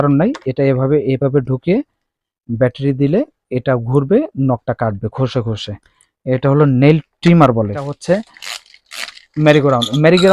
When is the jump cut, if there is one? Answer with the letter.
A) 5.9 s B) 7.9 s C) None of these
B